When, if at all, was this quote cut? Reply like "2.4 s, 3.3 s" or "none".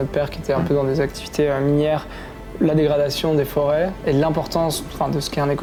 none